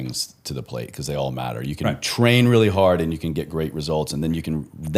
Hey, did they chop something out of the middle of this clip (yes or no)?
no